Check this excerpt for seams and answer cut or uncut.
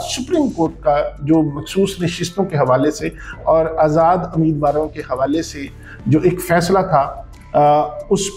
uncut